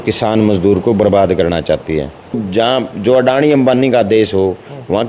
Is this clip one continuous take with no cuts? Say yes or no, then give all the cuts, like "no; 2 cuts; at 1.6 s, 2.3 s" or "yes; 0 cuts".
no; 1 cut; at 2.4 s